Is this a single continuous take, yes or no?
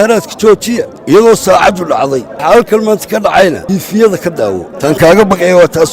no